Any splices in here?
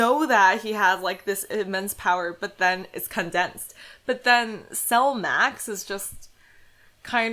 no; 0 cuts

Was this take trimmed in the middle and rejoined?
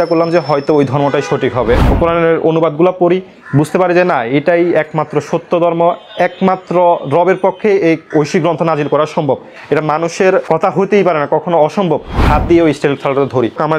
yes; 3 cuts; at 1.9 s, 8.1 s, 12.1 s

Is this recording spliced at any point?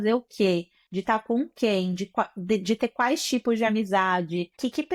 no; 0 cuts

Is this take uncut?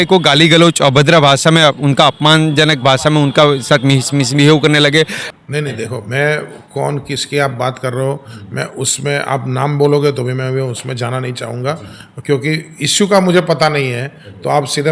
no; 1 cut; at 5.3 s

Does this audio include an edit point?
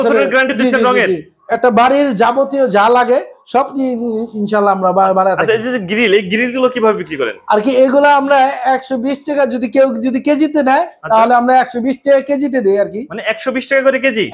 yes; 1 cut; at 1.3 s

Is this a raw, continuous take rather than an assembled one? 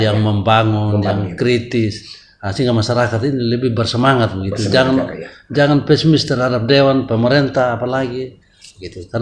yes; 0 cuts

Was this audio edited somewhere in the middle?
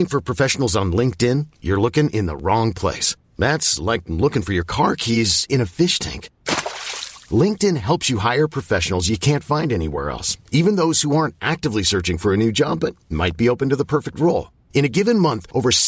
no; 0 cuts

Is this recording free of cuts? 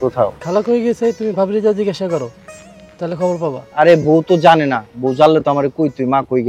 yes; 0 cuts

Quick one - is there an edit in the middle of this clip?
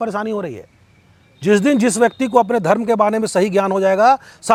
no; 0 cuts

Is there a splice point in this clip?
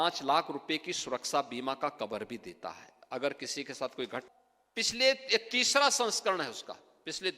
yes; 1 cut; at 4.2 s

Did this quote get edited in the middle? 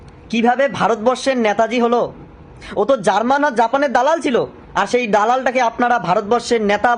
no; 0 cuts

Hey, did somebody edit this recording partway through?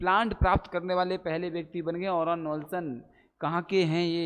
no; 0 cuts

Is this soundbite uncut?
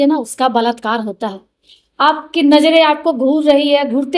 yes; 0 cuts

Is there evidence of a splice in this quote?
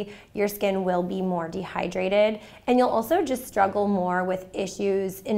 no; 0 cuts

